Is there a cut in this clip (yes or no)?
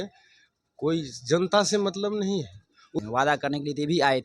yes